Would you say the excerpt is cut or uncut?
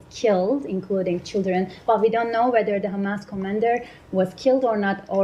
uncut